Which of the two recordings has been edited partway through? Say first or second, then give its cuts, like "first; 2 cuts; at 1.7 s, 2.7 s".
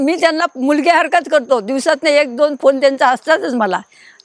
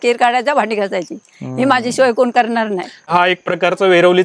second; 1 cut; at 3.1 s